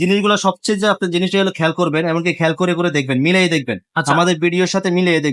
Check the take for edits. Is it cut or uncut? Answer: uncut